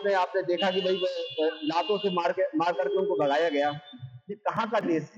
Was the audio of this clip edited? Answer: no; 0 cuts

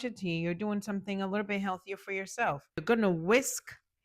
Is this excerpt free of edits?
no; 1 cut; at 2.8 s

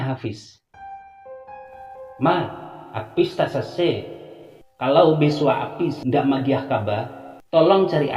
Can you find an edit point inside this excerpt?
no; 0 cuts

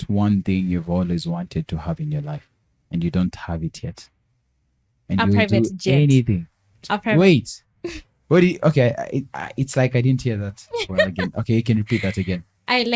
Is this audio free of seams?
yes; 0 cuts

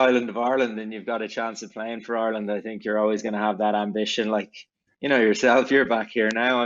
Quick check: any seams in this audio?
no; 0 cuts

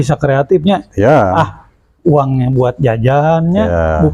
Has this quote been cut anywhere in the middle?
no; 0 cuts

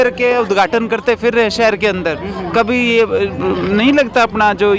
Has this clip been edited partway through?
no; 0 cuts

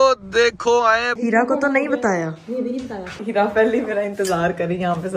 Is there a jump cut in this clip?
yes; 2 cuts; at 1.1 s, 3.2 s

